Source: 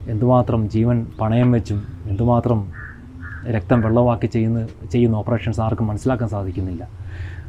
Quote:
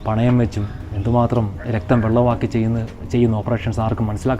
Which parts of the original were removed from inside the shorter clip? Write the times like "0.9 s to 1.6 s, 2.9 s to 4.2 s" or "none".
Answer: 2.7 s to 3.4 s